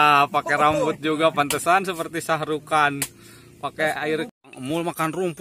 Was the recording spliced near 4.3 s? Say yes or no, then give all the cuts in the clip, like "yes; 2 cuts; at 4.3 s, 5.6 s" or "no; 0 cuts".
yes; 1 cut; at 4.3 s